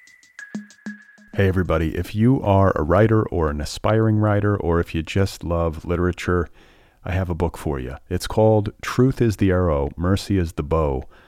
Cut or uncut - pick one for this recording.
cut